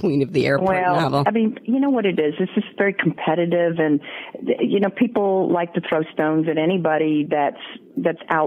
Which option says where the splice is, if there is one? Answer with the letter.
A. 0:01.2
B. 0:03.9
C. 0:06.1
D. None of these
A